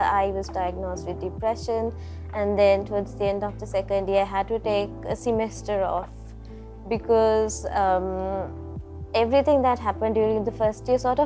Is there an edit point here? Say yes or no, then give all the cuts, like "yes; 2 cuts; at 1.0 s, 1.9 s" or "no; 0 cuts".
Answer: no; 0 cuts